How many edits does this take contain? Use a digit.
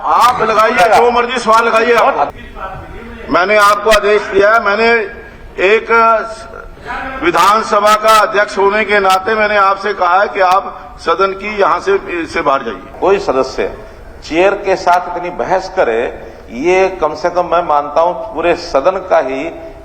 2